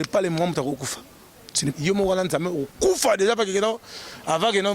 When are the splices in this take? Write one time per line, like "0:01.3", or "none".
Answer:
0:01.7

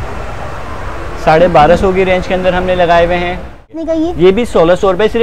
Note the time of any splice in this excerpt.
0:03.9

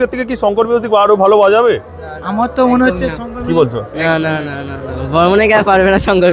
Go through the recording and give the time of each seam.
none

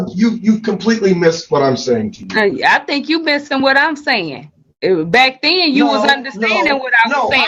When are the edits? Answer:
none

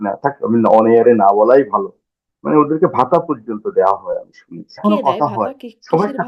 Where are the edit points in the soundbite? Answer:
0:04.8

